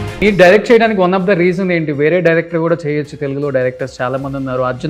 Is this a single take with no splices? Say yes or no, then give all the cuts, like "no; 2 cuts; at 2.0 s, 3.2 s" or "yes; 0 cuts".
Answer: yes; 0 cuts